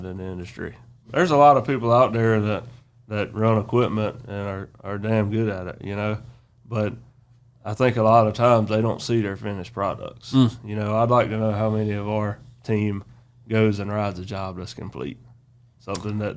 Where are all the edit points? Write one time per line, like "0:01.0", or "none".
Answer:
0:01.1